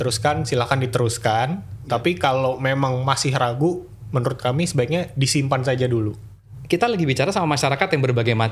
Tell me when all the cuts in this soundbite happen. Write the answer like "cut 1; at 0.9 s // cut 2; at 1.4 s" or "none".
cut 1; at 6.5 s